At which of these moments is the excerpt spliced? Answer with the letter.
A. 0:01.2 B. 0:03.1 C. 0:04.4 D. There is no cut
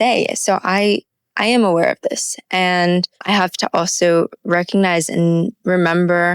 B